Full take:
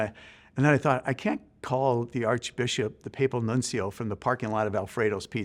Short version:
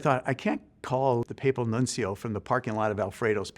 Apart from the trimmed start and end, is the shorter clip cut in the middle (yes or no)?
yes